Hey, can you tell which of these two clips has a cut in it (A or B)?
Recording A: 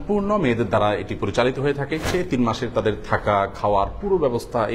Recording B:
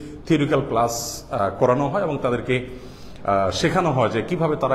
A